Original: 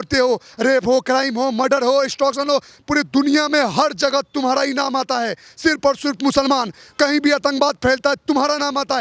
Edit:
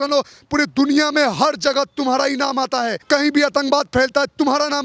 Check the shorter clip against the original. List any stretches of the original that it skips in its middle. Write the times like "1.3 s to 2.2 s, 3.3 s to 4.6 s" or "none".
5.3 s to 6.9 s